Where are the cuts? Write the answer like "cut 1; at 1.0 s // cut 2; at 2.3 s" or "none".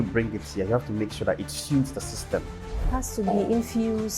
cut 1; at 2.9 s